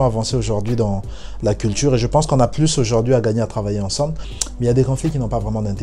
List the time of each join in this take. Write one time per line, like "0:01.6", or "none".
0:04.3